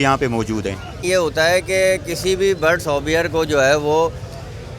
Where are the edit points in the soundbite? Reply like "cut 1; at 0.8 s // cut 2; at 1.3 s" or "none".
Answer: cut 1; at 1.0 s